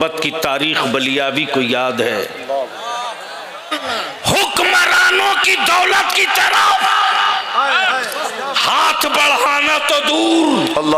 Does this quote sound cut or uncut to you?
cut